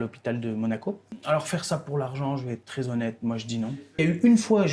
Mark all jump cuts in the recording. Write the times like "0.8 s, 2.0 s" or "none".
1.1 s, 4.0 s